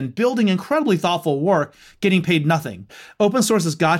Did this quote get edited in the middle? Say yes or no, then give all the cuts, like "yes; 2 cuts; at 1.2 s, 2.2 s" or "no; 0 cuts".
yes; 1 cut; at 3.0 s